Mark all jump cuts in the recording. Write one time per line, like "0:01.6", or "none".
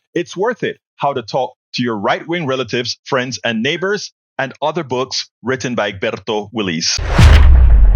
0:07.0

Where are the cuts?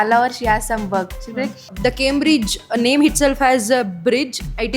0:01.7

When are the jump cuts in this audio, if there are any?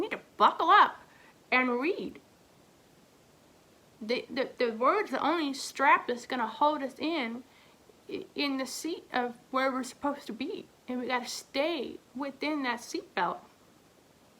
0:10.7
0:12.0

